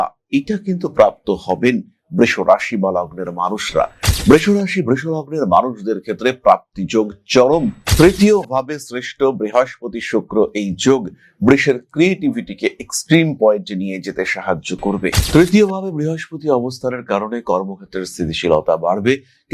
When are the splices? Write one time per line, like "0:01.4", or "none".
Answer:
0:15.2